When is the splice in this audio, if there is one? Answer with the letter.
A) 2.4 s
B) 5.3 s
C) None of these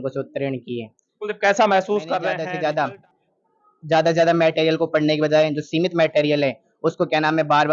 A